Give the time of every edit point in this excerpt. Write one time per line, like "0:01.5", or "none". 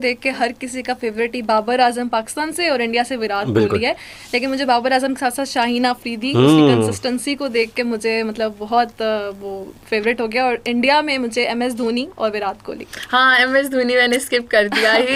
none